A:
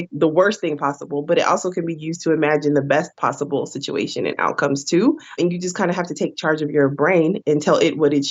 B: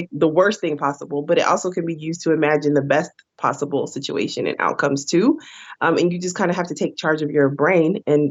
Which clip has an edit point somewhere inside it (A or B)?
A